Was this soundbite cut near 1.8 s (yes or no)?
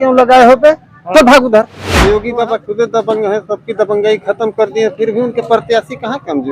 yes